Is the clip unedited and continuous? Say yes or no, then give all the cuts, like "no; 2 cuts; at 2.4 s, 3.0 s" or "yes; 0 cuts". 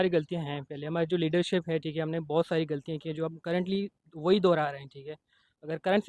yes; 0 cuts